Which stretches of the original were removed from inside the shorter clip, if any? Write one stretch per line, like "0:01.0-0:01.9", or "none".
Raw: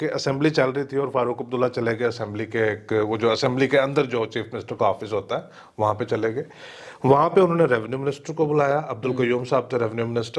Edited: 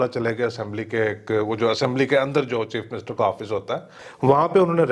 0:05.6-0:06.8

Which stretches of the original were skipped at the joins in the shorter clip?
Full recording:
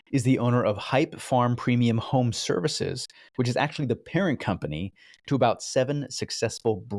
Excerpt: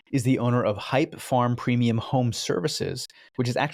none

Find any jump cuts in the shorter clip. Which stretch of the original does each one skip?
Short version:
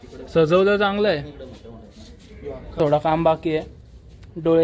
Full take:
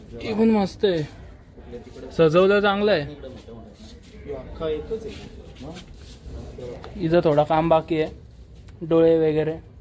0:04.6-0:07.2

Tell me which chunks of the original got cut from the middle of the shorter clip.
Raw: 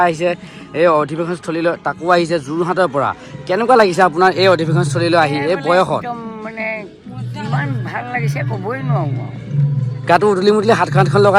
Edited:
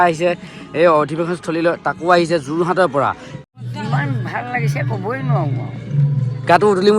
0:03.3-0:06.9

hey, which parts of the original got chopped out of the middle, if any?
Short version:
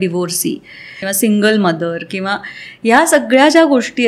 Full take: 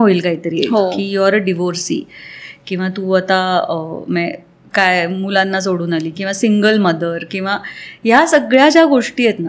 0:02.5-0:06.2

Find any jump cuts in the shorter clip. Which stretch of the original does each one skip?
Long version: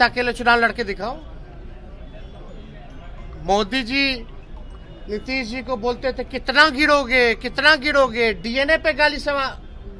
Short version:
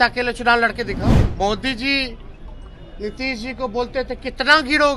0:01.2-0:03.2

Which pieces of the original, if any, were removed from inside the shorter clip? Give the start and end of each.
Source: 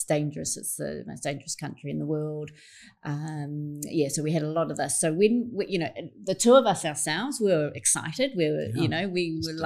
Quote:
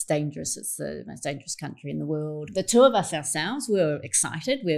0:02.4-0:06.1

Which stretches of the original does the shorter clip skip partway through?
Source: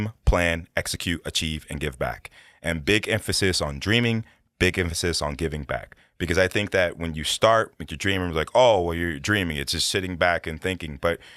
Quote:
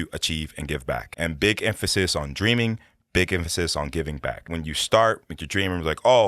0:02.2-0:02.5
0:06.0-0:07.0

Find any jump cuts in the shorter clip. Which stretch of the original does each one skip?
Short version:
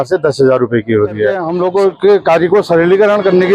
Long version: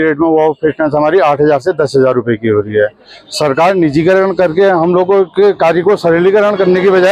0:03.0-0:04.8

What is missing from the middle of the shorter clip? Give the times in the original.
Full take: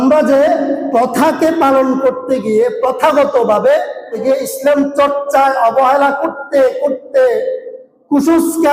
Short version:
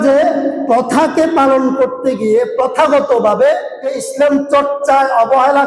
0:04.1-0:04.4

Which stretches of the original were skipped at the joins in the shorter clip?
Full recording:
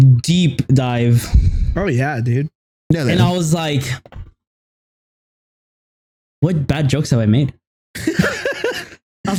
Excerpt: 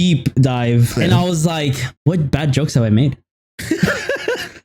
0:01.3-0:03.0
0:04.0-0:06.2

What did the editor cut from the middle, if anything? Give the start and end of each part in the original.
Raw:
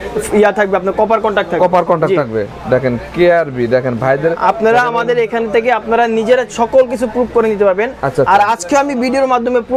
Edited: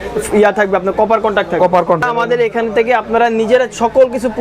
0:02.0-0:04.8

